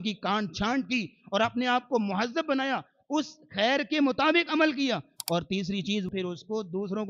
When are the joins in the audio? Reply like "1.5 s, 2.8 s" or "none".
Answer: 6.1 s

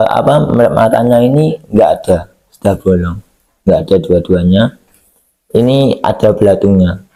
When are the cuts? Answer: none

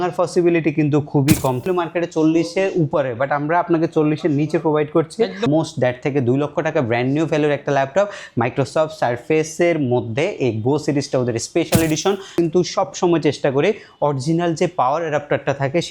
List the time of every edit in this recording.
1.6 s, 5.5 s, 12.3 s

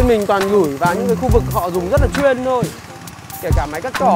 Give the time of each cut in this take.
none

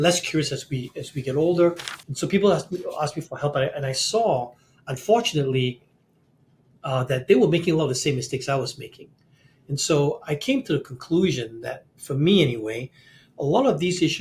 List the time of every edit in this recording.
1.9 s

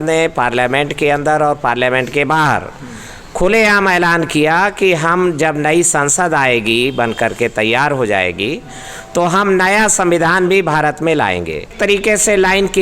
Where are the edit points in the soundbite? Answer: 11.7 s

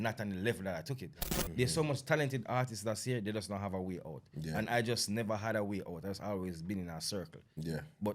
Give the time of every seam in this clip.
1.1 s

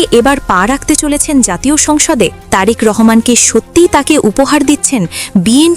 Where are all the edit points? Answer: none

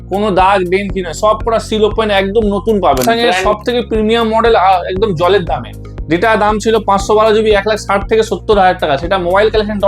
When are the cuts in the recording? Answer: 3.4 s

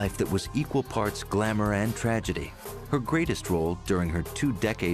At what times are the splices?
3.6 s

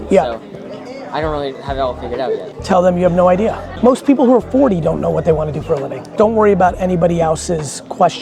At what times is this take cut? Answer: 2.5 s, 3.7 s, 6.1 s

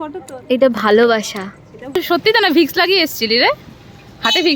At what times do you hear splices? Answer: 2.0 s

